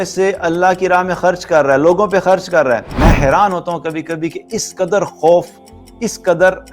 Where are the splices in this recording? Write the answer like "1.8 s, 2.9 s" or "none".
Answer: 2.9 s